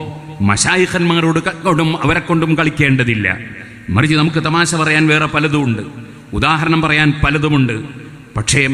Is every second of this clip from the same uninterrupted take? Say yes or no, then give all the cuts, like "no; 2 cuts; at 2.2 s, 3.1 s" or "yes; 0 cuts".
yes; 0 cuts